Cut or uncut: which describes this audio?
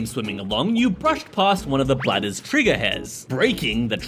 uncut